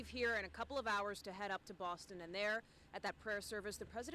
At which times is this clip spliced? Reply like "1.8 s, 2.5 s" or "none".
none